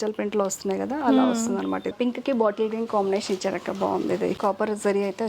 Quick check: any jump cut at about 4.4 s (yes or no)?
yes